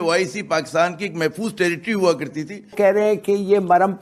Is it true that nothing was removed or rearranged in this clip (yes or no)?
no